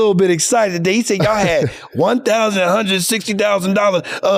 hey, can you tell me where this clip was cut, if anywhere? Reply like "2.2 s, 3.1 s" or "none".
none